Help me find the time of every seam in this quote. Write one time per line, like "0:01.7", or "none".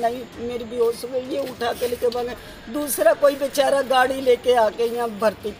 none

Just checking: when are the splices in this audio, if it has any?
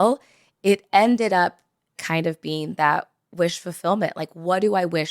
0:02.0

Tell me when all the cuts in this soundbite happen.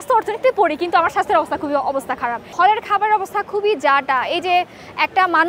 0:02.5

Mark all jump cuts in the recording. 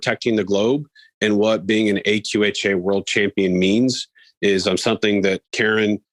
none

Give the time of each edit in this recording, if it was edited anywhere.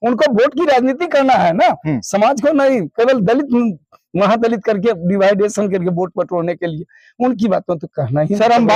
none

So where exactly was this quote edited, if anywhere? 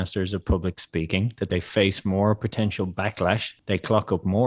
0:01.5
0:03.5

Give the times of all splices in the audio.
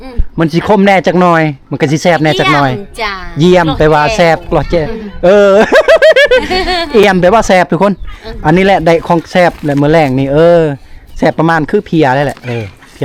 none

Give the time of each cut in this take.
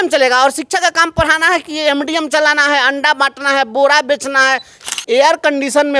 0:04.7

